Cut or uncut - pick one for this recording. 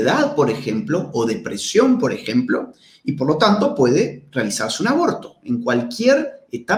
uncut